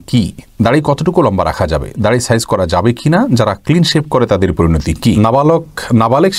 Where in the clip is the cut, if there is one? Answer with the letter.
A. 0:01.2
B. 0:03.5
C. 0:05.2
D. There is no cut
C